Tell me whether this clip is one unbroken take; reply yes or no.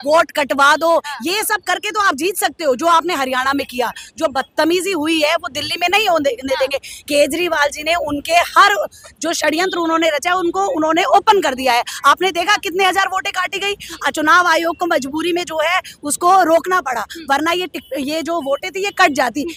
yes